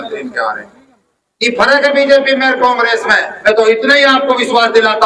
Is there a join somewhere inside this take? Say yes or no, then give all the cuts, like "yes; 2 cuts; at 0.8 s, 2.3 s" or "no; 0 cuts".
yes; 1 cut; at 3.3 s